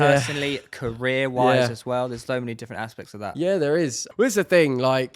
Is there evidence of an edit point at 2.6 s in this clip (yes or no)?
no